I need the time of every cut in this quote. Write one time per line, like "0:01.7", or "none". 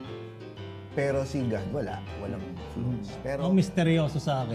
0:03.4